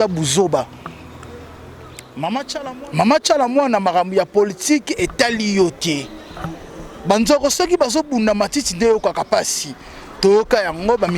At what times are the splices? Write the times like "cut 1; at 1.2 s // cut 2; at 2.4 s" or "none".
cut 1; at 2.6 s